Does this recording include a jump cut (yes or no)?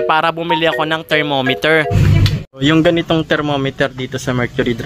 yes